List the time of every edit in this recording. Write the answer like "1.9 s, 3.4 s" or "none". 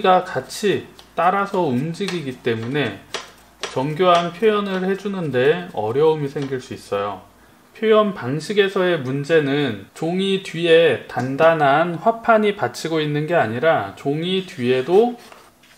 none

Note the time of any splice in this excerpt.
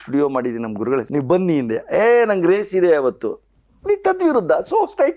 1.1 s

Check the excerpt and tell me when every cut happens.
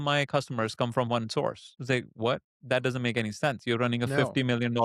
none

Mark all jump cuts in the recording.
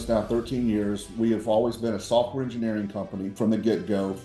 3.3 s

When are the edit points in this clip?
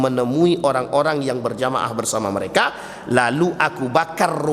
none

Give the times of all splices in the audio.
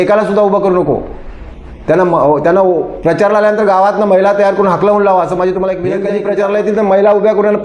6.0 s

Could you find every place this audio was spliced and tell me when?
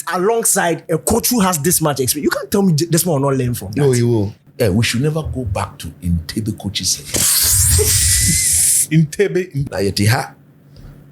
4.4 s, 9.6 s

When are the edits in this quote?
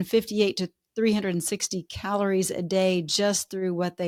none

